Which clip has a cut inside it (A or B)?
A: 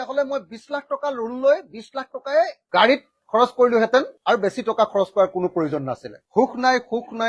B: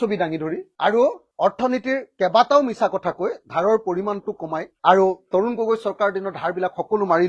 A